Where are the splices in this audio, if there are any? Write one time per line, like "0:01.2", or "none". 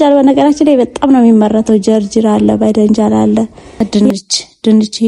0:03.8

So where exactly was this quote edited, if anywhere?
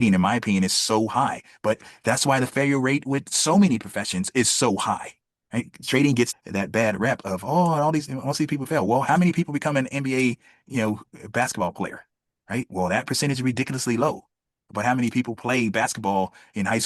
0:06.3

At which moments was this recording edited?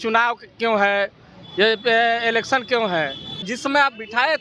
0:03.4

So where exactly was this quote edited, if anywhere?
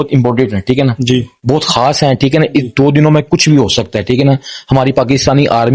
none

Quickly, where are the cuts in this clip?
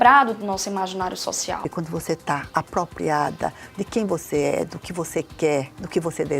0:01.7

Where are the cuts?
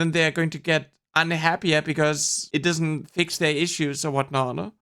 0:02.3

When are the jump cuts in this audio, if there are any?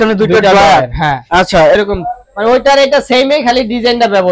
0:01.8

